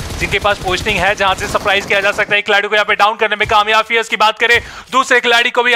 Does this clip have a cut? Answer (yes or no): no